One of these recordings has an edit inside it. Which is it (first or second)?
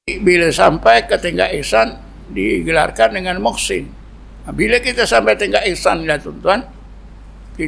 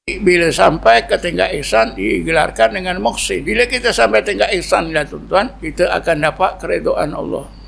second